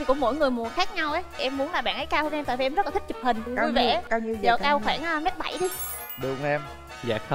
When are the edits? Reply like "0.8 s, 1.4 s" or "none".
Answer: 1.4 s